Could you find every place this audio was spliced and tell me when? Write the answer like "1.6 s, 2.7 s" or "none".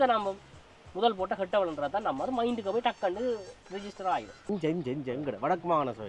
4.4 s